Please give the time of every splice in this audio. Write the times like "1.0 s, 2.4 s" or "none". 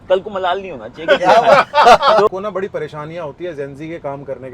2.3 s